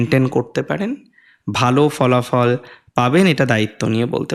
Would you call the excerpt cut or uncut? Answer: uncut